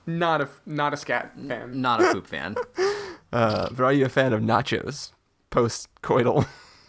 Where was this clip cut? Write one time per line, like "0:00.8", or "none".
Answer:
none